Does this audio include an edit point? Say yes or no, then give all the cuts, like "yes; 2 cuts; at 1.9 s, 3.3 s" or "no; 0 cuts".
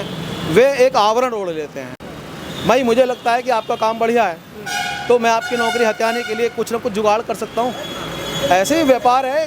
no; 0 cuts